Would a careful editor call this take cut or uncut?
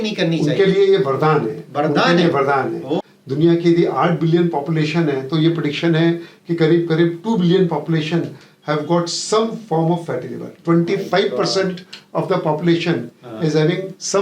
cut